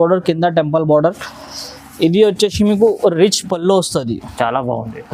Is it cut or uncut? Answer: uncut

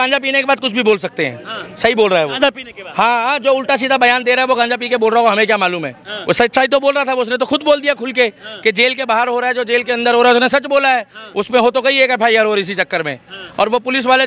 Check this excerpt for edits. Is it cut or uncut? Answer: uncut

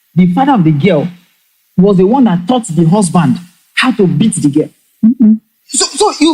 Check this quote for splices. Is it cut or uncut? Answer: uncut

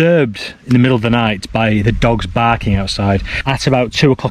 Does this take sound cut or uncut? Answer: cut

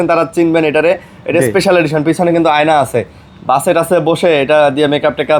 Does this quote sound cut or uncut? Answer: uncut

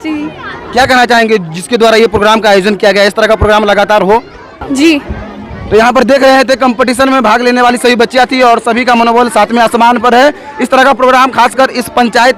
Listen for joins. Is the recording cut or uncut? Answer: uncut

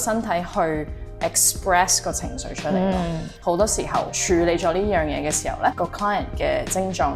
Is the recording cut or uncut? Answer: cut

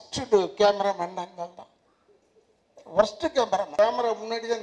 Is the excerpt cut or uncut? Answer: cut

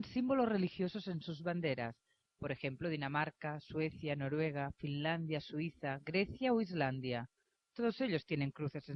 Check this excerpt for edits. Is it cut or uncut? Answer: uncut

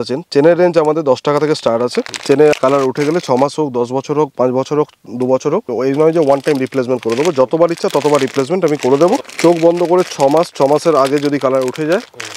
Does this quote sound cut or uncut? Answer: cut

